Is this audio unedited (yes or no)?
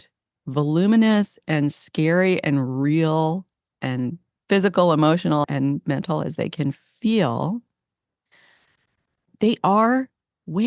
no